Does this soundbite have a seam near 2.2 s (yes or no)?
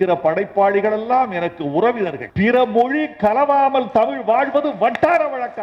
yes